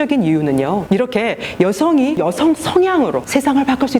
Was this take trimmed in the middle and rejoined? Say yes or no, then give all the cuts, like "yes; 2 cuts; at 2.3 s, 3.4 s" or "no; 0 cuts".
yes; 3 cuts; at 0.8 s, 2.2 s, 3.2 s